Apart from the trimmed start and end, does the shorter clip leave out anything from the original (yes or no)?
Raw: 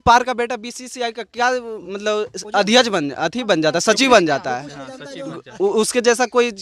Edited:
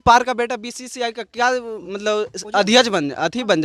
no